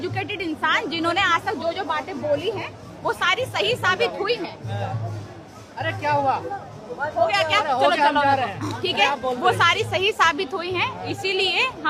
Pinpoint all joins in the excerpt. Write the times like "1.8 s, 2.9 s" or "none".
none